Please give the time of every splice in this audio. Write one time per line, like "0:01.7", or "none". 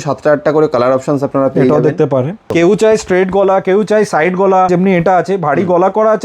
0:02.5
0:04.7

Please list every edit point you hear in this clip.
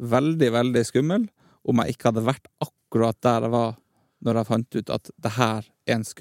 none

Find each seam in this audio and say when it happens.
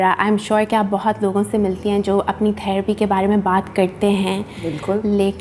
none

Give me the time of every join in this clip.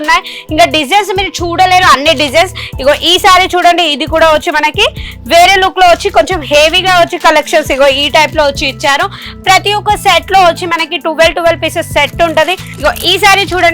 0:12.7

